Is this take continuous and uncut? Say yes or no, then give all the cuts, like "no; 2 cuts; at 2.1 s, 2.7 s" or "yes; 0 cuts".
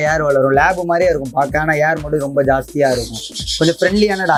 yes; 0 cuts